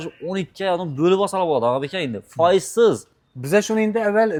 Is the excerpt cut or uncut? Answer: uncut